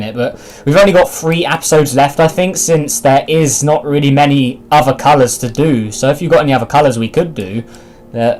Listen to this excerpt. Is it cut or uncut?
cut